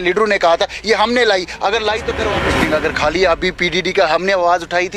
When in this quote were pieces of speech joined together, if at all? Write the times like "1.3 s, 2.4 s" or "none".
2.2 s